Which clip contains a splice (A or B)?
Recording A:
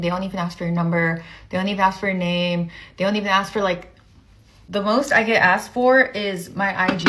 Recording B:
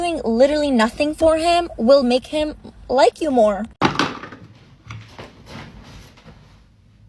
B